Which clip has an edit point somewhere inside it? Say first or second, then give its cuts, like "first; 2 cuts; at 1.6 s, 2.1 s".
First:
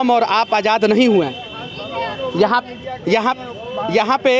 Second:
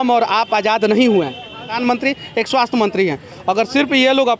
second; 1 cut; at 1.8 s